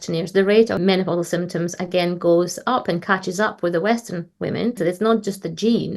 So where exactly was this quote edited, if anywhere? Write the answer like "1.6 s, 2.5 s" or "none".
0.8 s, 4.8 s